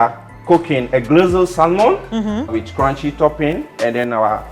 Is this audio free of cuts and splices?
no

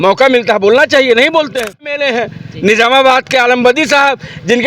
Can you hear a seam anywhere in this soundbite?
yes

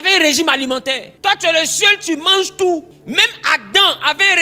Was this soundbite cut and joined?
yes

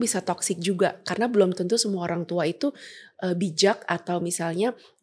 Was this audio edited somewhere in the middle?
no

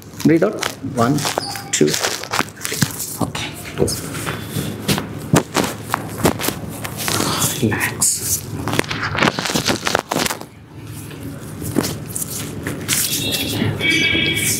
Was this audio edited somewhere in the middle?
no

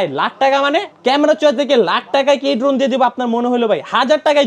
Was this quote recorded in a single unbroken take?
no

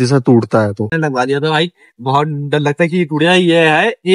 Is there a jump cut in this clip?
yes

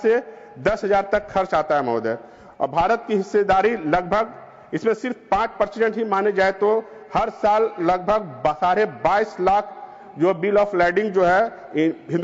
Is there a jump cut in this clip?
no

